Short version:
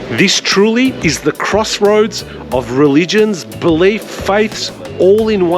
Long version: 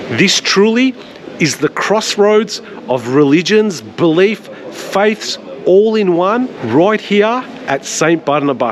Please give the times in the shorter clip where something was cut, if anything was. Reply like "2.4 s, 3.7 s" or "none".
1.0 s, 4.1 s